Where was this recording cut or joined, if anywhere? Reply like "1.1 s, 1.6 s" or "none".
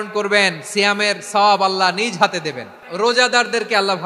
2.8 s